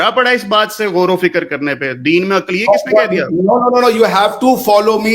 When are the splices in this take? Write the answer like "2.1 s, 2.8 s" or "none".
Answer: none